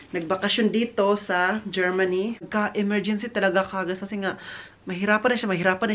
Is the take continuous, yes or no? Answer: no